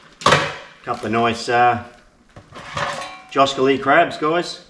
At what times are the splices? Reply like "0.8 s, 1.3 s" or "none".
none